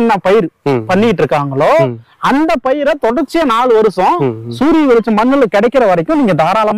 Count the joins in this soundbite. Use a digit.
0